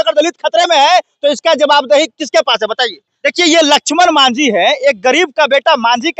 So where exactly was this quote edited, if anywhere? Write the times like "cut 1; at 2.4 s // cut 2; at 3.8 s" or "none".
cut 1; at 3.0 s